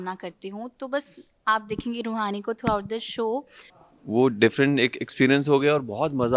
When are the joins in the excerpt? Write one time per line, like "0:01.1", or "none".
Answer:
0:03.8

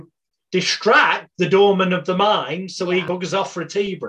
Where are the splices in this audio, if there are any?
0:03.0

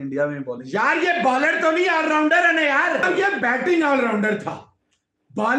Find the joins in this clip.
0:03.1

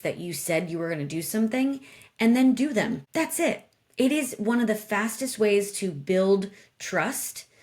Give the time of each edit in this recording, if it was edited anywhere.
0:03.0

